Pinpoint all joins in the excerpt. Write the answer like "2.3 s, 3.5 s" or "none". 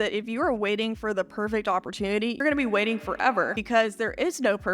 2.4 s, 3.6 s